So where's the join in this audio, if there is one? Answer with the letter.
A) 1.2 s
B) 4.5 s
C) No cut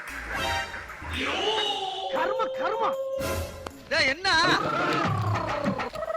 B